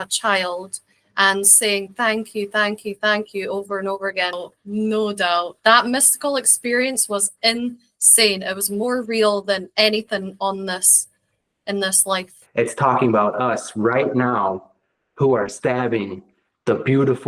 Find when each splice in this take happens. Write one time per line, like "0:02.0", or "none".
0:04.4
0:12.4